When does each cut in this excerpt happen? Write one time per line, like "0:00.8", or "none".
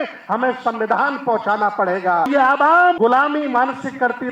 0:02.3
0:03.0